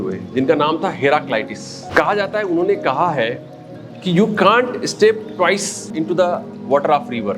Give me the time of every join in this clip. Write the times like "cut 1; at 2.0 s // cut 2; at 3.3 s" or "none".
cut 1; at 1.9 s // cut 2; at 5.9 s